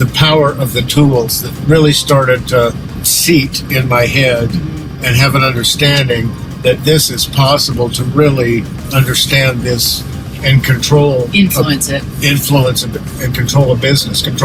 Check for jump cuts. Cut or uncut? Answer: uncut